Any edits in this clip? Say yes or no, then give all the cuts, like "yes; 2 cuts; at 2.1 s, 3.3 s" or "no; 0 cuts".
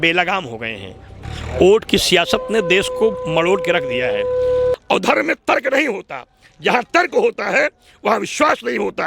yes; 2 cuts; at 1.3 s, 4.7 s